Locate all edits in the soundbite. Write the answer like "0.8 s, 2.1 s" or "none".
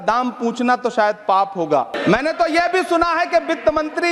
1.9 s